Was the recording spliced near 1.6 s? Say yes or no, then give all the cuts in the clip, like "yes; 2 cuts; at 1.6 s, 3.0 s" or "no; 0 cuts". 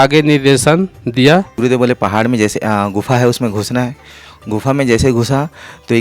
yes; 1 cut; at 1.6 s